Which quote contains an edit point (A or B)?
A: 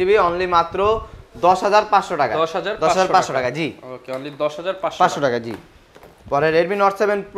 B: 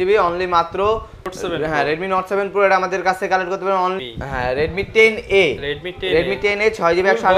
B